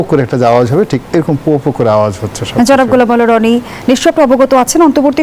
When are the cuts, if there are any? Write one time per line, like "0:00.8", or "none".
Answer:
none